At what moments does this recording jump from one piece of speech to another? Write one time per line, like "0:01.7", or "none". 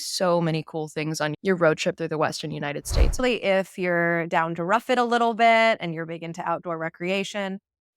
0:03.1